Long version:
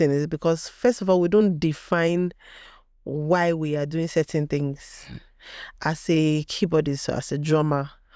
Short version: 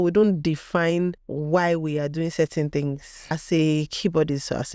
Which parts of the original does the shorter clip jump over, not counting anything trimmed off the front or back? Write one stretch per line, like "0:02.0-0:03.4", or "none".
0:02.5-0:03.1
0:05.1-0:05.9